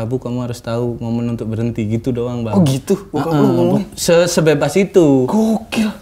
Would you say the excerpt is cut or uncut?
uncut